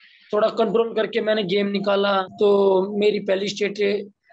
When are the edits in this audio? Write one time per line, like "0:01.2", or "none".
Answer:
0:02.3